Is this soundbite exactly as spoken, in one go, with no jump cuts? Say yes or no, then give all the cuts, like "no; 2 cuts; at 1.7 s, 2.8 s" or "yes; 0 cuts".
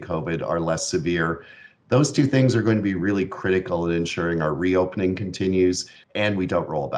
no; 1 cut; at 5.9 s